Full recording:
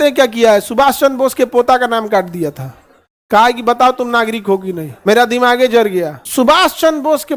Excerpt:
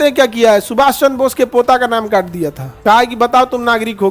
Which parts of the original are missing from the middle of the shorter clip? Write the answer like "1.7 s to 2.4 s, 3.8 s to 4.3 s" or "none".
2.7 s to 3.1 s